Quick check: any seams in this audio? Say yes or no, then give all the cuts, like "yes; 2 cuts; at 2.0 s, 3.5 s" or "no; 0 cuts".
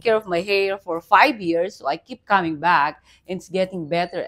no; 0 cuts